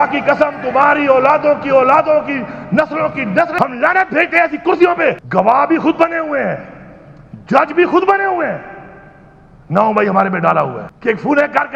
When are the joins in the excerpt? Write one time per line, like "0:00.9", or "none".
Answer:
0:03.5
0:05.2
0:10.9